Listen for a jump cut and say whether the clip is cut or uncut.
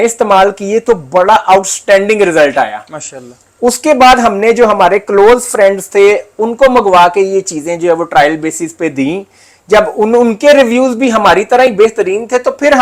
uncut